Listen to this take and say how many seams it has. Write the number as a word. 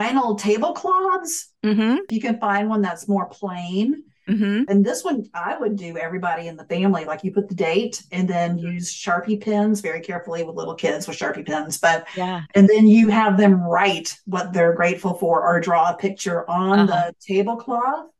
two